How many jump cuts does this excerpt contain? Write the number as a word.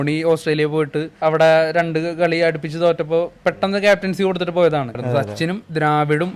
two